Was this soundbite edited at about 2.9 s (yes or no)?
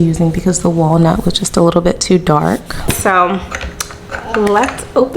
yes